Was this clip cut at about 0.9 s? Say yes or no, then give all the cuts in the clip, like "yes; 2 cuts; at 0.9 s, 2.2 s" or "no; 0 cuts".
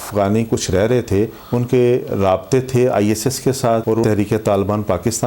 no; 1 cut; at 4.0 s